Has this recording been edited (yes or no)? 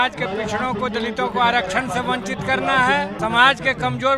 yes